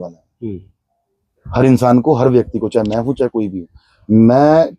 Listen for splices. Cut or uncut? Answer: uncut